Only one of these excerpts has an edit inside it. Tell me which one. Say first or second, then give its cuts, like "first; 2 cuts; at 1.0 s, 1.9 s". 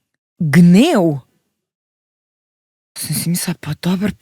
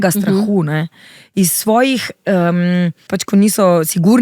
second; 1 cut; at 3.1 s